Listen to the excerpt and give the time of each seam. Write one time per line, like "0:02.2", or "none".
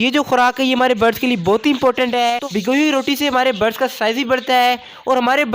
0:02.4